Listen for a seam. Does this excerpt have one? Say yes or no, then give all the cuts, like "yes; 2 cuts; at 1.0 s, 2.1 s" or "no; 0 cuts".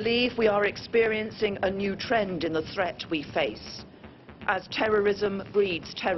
no; 0 cuts